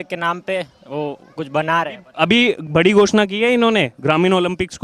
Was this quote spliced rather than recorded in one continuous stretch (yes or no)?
no